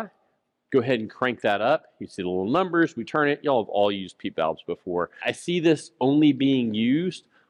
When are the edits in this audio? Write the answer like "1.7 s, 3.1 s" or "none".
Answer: 5.2 s